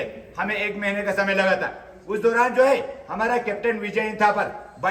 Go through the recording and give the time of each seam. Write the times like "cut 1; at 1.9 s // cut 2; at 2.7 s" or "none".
none